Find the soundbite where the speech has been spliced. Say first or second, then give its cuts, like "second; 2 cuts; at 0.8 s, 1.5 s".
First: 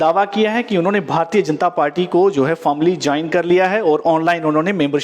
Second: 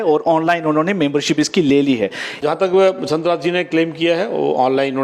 second; 1 cut; at 2.5 s